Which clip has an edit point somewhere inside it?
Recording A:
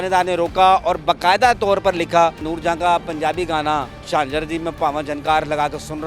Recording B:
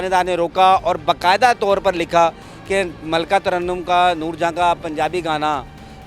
A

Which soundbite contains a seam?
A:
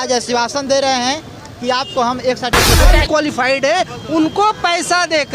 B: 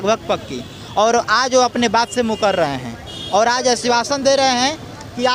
A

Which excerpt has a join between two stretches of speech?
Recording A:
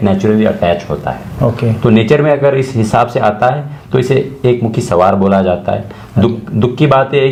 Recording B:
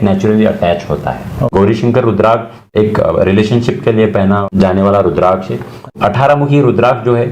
B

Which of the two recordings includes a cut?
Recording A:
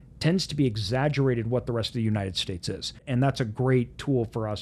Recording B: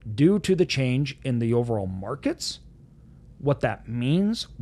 A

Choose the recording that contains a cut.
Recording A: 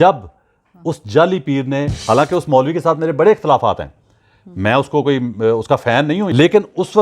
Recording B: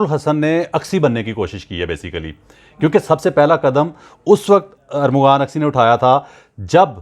A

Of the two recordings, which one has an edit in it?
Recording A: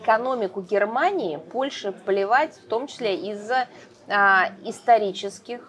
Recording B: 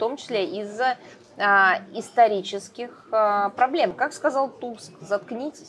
B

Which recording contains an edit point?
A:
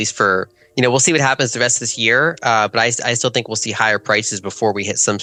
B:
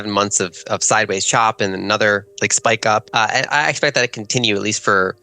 B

